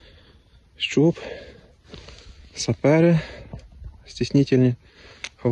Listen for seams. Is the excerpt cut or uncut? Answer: uncut